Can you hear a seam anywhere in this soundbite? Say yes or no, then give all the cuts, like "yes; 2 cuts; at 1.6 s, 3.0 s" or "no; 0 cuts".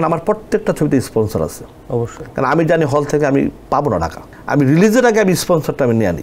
no; 0 cuts